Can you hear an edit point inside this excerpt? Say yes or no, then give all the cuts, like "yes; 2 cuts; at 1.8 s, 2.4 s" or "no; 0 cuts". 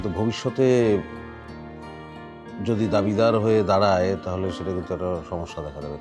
no; 0 cuts